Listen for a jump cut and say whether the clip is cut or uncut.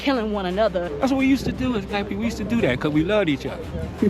cut